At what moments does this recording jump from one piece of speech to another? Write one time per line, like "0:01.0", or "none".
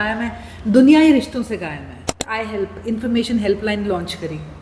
0:02.3